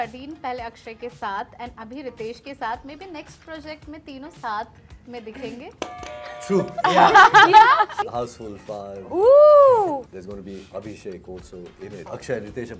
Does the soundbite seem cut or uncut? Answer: cut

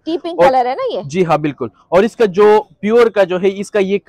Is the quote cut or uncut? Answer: uncut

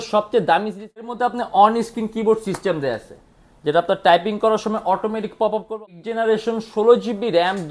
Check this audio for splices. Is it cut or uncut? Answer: cut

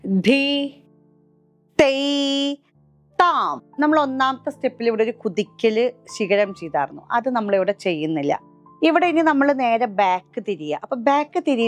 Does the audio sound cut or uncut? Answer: uncut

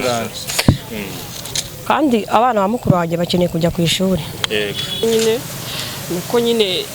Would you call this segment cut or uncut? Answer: cut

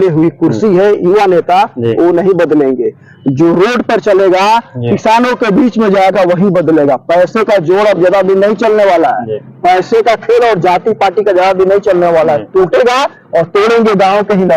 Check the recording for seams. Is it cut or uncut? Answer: uncut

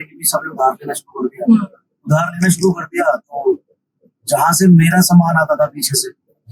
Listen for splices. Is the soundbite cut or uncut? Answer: uncut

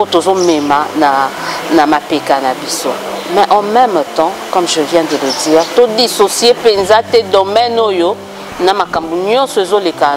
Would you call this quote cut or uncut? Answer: uncut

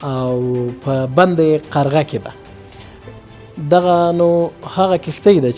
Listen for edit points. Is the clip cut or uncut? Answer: uncut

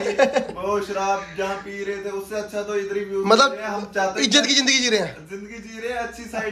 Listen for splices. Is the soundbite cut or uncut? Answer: uncut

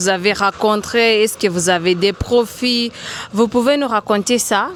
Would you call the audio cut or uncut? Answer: uncut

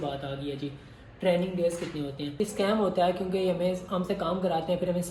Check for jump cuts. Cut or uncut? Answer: cut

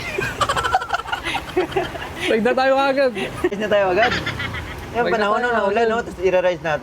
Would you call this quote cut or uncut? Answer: cut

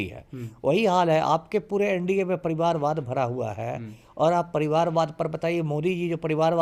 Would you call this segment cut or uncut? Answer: uncut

